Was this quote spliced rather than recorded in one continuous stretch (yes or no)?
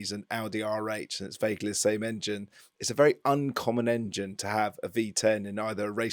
no